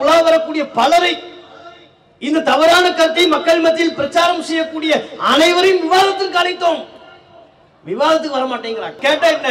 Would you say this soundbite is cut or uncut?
uncut